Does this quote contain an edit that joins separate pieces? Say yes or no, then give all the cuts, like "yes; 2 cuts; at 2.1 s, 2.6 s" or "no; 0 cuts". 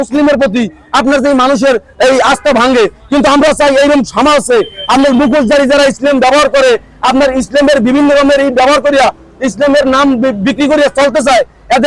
no; 0 cuts